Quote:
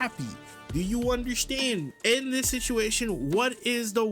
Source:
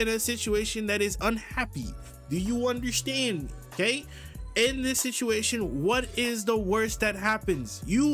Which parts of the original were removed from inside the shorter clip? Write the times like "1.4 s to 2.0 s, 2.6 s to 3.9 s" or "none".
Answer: 3.5 s to 4.4 s